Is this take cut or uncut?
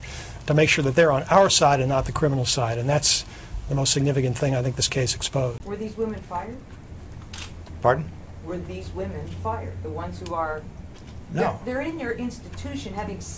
cut